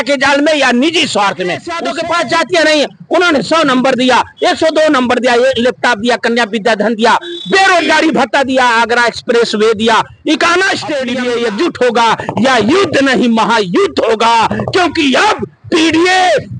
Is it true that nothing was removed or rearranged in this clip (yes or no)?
no